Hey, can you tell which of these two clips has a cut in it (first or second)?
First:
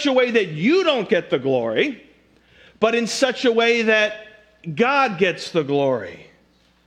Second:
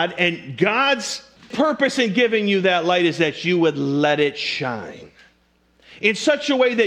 second